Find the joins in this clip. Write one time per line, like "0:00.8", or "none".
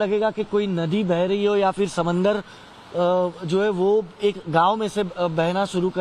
none